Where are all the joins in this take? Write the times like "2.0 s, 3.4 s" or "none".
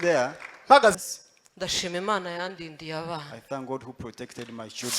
1.0 s